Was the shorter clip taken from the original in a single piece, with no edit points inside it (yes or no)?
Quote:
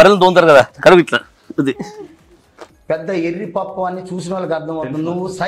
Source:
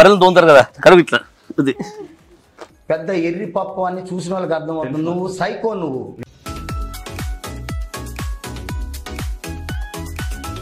yes